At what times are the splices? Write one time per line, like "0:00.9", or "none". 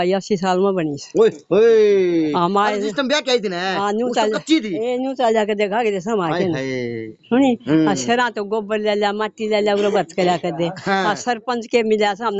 none